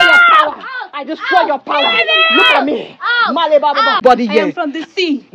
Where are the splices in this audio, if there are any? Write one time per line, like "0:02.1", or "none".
0:04.0